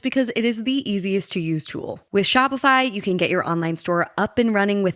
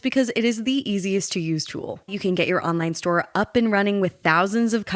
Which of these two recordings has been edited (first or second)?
second